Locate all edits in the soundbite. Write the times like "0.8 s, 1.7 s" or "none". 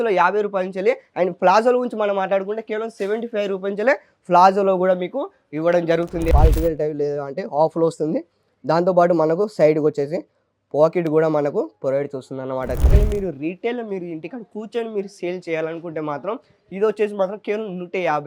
6.3 s, 12.8 s